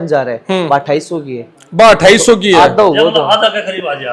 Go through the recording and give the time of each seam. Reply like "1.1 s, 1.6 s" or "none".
none